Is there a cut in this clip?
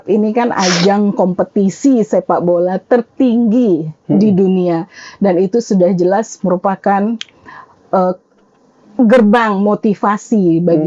no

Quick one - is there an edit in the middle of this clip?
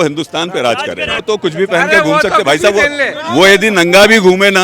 yes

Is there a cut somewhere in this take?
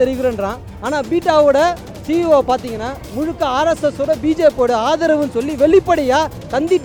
no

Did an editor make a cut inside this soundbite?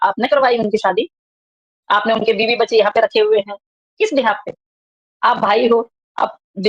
no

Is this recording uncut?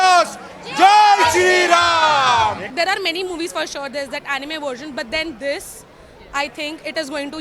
no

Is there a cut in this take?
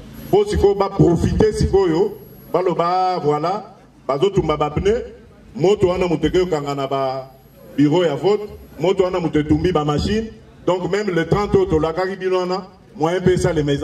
no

